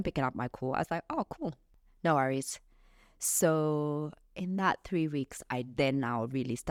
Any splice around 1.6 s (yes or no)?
no